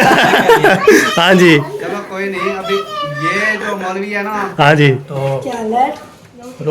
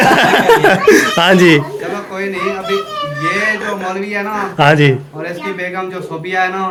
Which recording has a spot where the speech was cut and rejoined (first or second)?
first